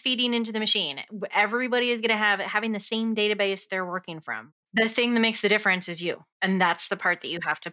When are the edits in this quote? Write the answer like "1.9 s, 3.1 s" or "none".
4.5 s